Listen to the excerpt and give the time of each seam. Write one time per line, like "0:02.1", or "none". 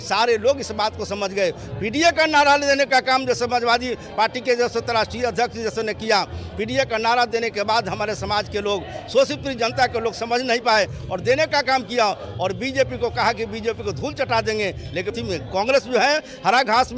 0:15.1